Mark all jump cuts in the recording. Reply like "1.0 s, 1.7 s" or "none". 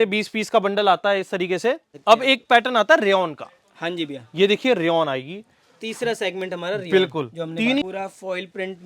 1.9 s, 7.8 s